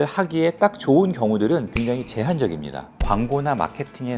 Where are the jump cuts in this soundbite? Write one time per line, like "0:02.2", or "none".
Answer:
0:01.7
0:02.9

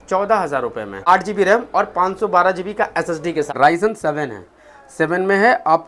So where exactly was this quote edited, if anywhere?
0:01.1
0:03.5

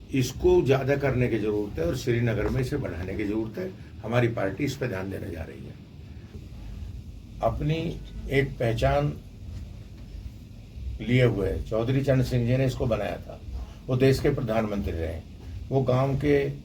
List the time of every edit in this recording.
0:06.4

